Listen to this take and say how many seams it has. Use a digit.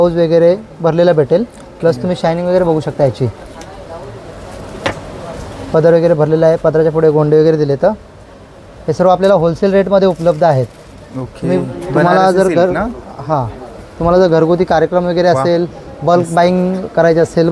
0